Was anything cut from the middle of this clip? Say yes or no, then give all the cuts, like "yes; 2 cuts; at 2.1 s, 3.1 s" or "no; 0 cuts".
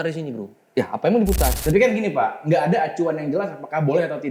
yes; 1 cut; at 1.6 s